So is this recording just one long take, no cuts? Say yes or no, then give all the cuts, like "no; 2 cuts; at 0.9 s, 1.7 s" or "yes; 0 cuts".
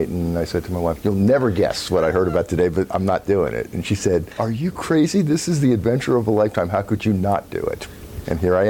no; 2 cuts; at 1.0 s, 4.3 s